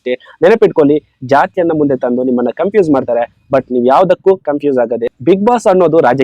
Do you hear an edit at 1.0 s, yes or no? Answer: no